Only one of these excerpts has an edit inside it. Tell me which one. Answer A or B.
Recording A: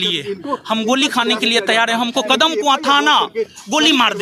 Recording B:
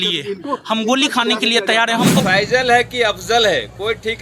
B